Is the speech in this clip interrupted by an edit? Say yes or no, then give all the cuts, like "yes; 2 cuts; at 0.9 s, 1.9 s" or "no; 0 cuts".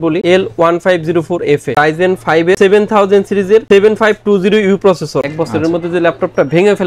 yes; 2 cuts; at 1.7 s, 5.2 s